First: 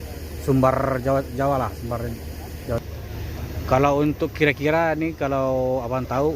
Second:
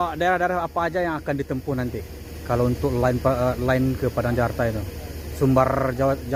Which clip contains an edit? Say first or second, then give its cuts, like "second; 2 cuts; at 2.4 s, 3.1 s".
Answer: first; 1 cut; at 2.8 s